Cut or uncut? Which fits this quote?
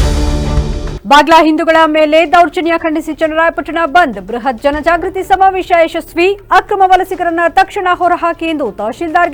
uncut